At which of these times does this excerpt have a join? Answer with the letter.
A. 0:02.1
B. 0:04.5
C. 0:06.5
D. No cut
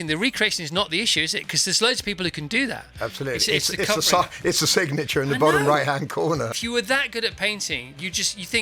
C